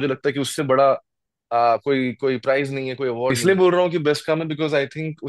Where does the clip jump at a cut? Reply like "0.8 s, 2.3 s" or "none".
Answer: 3.4 s